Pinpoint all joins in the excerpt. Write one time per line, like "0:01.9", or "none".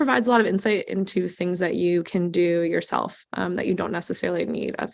none